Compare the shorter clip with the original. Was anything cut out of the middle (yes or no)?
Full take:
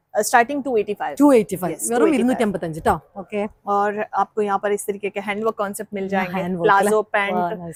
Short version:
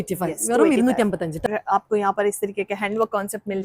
yes